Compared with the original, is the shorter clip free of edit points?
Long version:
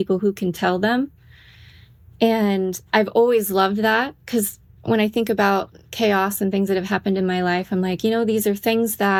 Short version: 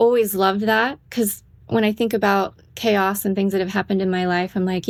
yes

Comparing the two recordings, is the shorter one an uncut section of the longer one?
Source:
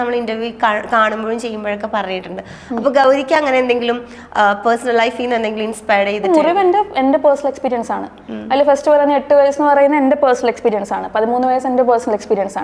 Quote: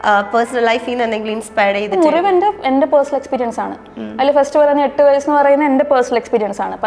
yes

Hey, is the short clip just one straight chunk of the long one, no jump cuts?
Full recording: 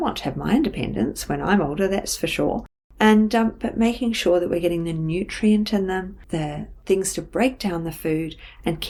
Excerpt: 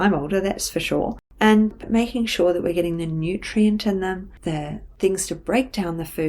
no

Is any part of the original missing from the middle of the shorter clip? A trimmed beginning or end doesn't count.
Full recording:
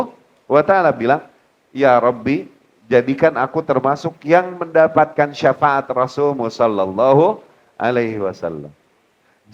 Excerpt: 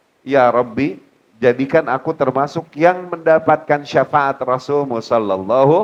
no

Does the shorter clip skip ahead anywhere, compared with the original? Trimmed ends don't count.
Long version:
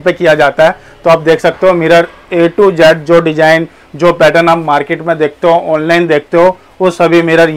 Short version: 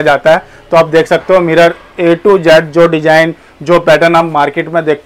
no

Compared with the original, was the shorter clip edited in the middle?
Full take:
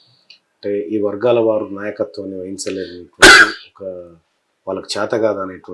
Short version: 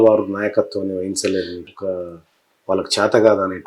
yes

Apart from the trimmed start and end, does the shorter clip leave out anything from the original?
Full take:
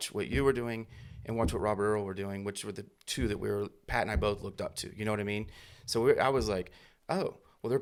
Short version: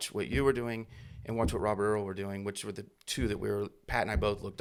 no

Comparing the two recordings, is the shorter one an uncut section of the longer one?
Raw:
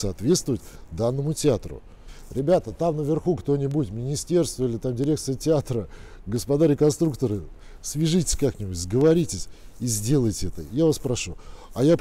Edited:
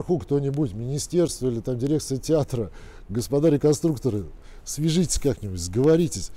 yes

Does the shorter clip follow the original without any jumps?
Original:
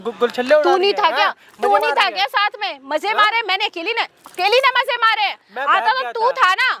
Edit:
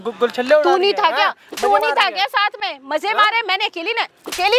yes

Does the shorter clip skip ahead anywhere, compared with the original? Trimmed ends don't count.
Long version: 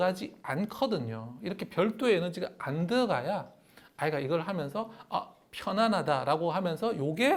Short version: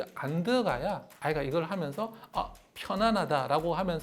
yes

